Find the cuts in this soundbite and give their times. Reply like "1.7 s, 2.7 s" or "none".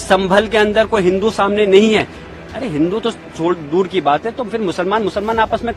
none